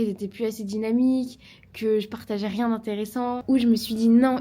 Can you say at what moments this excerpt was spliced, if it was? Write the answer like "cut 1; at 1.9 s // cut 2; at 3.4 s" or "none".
cut 1; at 3.4 s